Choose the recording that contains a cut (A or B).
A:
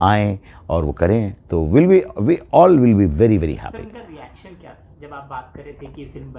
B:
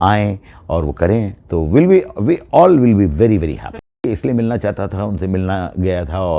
B